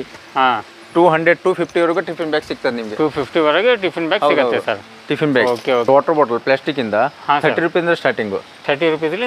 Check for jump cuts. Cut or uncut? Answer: cut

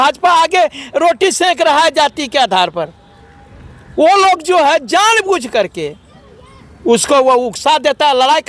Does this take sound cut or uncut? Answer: uncut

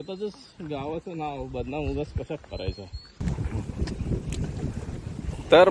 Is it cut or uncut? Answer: cut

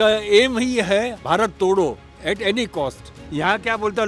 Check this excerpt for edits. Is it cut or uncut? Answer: cut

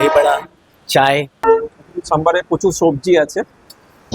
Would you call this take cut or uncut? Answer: cut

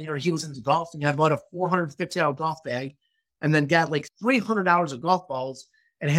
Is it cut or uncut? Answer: cut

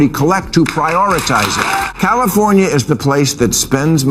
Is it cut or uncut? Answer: cut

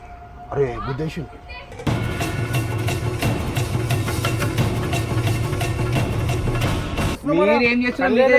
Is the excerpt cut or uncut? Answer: cut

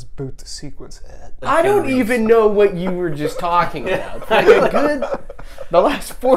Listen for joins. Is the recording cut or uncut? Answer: cut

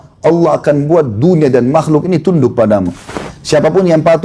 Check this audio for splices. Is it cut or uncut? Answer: cut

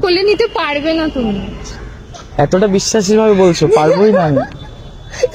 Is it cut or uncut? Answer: uncut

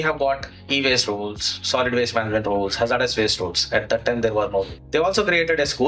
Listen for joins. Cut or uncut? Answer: cut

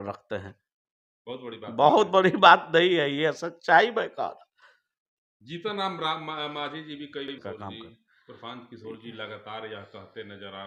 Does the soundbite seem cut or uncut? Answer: uncut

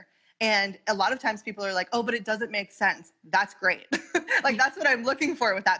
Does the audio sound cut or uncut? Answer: uncut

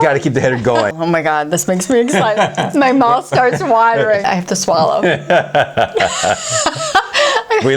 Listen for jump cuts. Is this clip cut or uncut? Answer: cut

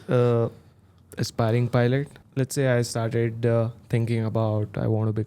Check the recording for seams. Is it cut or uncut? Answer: cut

